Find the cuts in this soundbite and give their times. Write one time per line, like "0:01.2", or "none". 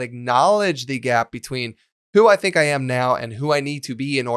none